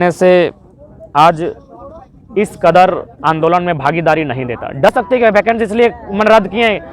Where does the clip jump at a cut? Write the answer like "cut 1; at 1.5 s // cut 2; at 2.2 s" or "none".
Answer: cut 1; at 4.9 s